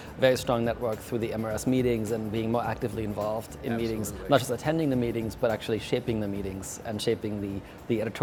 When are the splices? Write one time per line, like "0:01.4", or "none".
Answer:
none